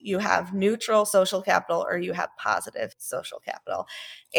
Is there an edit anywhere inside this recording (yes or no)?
yes